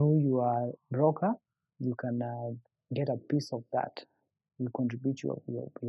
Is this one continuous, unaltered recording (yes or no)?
yes